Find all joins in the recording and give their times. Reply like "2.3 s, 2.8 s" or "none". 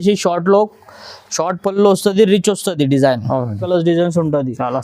3.6 s